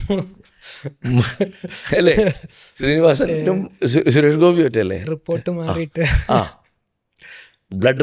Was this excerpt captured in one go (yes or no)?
yes